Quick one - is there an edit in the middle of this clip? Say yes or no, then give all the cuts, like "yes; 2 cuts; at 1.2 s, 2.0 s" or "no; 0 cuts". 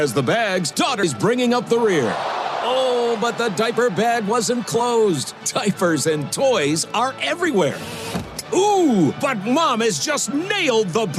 yes; 1 cut; at 1.0 s